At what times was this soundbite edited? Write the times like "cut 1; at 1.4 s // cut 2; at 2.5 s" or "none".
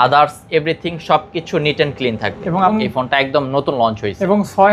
cut 1; at 2.7 s